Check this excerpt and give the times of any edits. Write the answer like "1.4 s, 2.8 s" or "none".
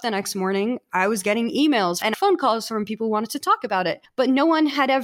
2.1 s, 4.0 s